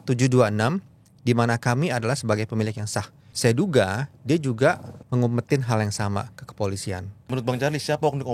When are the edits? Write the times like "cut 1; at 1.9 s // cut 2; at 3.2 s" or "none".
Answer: cut 1; at 3.2 s // cut 2; at 4.9 s // cut 3; at 7.1 s